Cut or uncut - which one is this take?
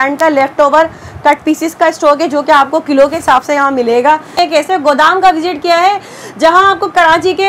cut